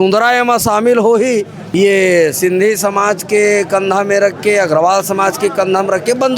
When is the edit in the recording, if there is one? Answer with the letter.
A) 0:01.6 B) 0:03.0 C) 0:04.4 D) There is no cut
A